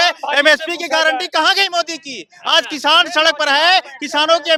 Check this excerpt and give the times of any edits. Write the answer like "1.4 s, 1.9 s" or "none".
none